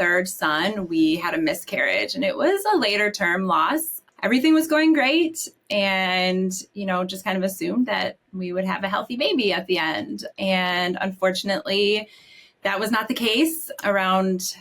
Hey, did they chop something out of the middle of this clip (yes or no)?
yes